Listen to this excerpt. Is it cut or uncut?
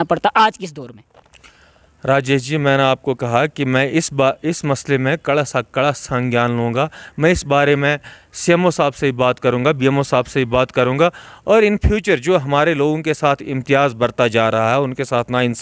uncut